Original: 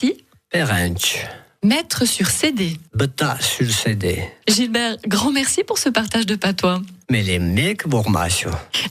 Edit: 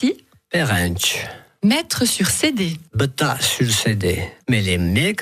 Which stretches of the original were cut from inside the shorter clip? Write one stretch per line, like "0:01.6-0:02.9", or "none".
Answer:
0:04.3-0:06.9